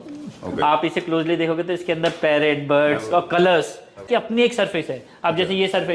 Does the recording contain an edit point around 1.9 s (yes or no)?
no